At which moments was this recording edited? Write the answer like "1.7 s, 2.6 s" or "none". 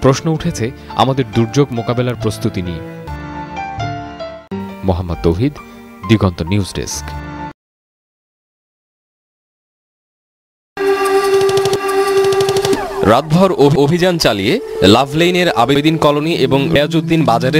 none